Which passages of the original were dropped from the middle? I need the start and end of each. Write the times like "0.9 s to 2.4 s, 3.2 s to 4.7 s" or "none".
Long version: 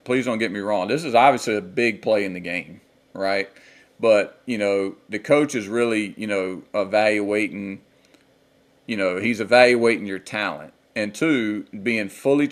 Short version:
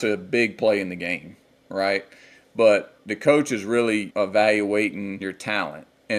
4.4 s to 5.0 s, 6.1 s to 6.7 s, 7.9 s to 10.2 s